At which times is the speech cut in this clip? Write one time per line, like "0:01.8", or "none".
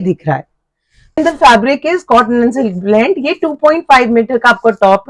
0:01.2